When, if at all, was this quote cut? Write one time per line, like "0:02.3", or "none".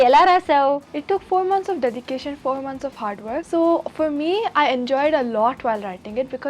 0:00.9
0:03.4